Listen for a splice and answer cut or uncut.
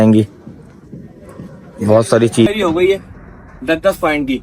cut